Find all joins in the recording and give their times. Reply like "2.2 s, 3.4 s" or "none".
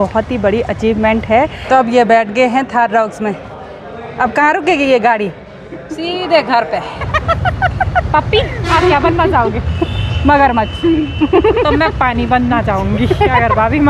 1.7 s, 7.0 s